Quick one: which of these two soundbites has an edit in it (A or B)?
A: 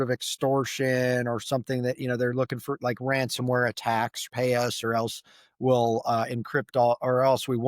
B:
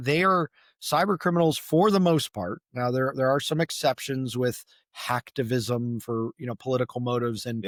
A